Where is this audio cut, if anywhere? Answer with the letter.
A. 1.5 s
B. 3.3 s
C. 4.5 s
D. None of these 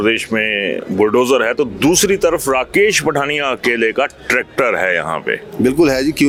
D